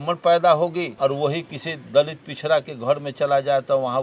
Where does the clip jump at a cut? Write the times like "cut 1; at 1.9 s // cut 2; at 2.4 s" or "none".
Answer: cut 1; at 0.9 s